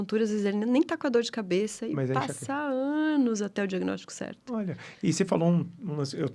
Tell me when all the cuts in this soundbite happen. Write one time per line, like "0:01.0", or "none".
none